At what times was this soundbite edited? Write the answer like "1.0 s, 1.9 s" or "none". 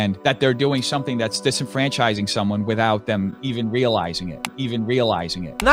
none